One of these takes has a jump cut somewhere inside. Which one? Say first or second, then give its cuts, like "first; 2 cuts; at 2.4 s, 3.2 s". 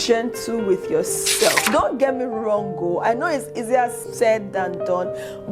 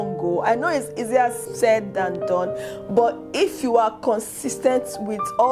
first; 1 cut; at 1.6 s